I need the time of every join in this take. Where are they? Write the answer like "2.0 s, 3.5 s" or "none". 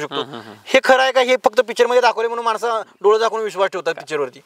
none